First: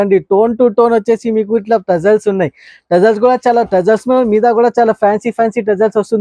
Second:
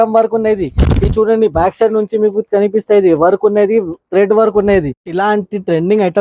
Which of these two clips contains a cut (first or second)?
second